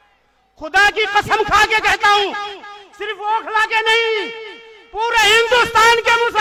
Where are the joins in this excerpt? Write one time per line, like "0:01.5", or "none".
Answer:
none